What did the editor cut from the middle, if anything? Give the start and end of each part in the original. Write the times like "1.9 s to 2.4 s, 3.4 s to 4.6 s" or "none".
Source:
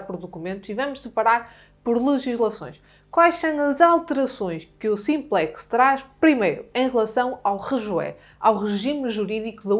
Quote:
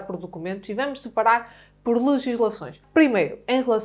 2.8 s to 6.1 s